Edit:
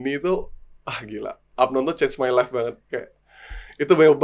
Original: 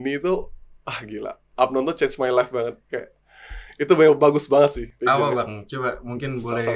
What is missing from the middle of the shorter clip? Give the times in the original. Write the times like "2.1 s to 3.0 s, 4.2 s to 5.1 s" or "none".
none

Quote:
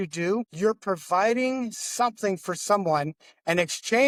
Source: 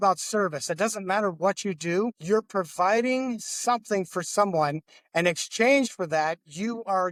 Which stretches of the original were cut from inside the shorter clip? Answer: none

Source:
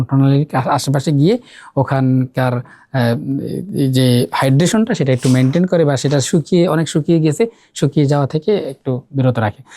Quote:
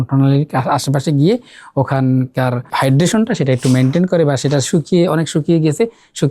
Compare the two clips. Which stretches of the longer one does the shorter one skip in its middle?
2.7 s to 4.3 s

